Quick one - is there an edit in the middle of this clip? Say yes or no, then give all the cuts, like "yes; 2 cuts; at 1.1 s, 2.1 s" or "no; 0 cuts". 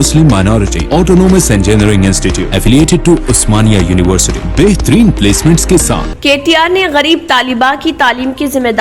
yes; 1 cut; at 6.1 s